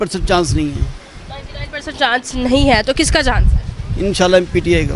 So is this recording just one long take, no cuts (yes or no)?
yes